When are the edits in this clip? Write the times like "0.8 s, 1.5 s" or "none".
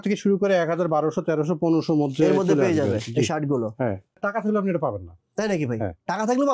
4.2 s